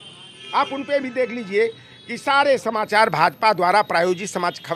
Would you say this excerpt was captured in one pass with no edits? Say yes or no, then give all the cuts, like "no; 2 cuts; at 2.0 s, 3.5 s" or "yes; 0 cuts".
yes; 0 cuts